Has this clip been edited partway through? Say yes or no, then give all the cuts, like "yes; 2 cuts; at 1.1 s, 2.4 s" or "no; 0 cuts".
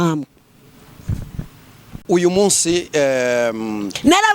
yes; 1 cut; at 1.9 s